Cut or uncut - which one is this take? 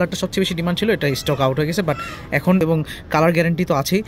cut